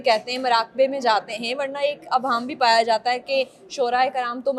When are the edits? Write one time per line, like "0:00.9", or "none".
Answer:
none